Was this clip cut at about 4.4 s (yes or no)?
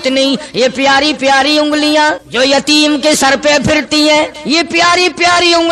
yes